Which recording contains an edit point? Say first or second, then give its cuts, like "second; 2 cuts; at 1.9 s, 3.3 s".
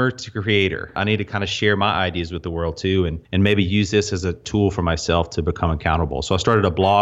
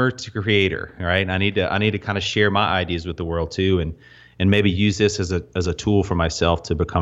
first; 3 cuts; at 1.0 s, 3.2 s, 4.4 s